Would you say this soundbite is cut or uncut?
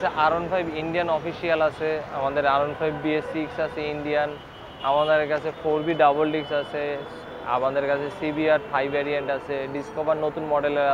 uncut